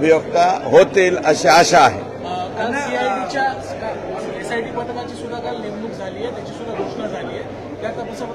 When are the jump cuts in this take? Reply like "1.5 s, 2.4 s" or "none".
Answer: none